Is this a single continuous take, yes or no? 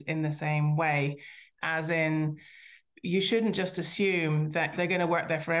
no